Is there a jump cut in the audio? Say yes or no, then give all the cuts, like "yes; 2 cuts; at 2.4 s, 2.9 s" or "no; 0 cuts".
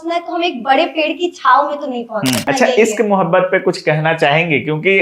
yes; 1 cut; at 2.5 s